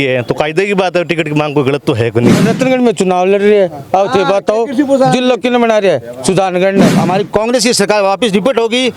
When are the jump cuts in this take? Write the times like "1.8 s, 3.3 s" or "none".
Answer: 2.5 s, 7.0 s